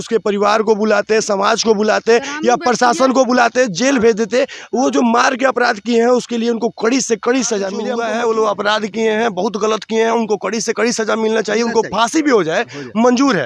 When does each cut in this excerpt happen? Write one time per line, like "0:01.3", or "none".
0:07.8